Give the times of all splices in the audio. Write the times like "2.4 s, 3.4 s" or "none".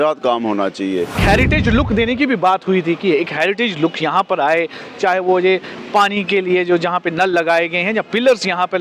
1.2 s